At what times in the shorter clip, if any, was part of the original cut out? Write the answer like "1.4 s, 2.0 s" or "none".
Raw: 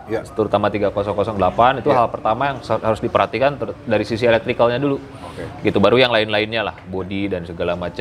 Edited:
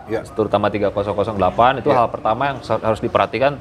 none